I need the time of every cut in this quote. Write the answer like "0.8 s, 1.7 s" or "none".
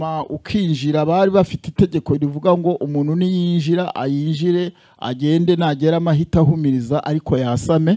none